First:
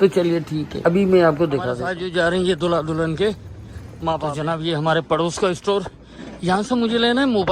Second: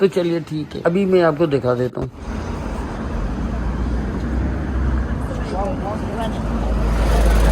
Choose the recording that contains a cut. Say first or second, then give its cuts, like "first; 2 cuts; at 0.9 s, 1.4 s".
first; 2 cuts; at 1.8 s, 4.4 s